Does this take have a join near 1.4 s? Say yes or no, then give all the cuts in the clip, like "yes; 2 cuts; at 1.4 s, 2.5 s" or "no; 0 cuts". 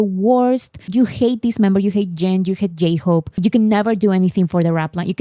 no; 1 cut; at 3.4 s